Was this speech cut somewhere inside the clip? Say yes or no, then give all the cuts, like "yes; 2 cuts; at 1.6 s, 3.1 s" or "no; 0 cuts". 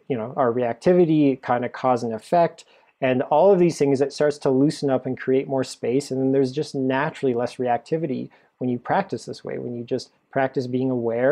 no; 0 cuts